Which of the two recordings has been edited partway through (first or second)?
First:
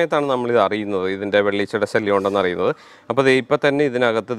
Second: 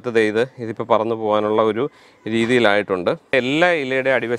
second